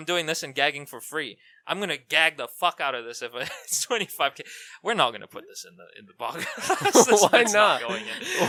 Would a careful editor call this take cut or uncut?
uncut